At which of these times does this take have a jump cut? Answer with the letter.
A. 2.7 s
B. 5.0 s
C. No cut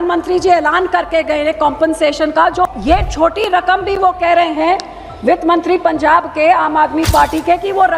A